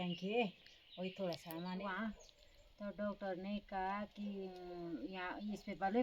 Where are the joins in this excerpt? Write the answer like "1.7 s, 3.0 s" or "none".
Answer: 1.8 s